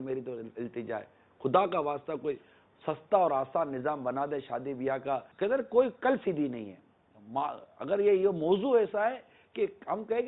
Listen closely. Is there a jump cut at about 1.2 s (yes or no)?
no